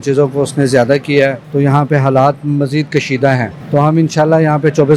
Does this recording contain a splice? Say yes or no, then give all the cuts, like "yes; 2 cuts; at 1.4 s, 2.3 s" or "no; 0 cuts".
yes; 2 cuts; at 1.4 s, 3.6 s